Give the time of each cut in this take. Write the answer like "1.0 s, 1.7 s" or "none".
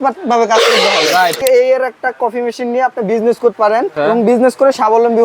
1.4 s, 3.5 s